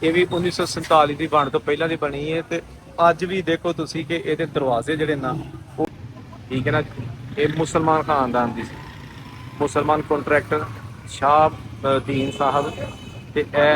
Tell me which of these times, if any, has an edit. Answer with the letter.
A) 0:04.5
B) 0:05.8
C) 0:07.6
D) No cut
B